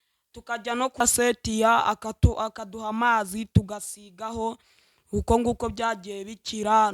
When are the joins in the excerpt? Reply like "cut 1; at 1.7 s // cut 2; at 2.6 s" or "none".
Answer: cut 1; at 1.0 s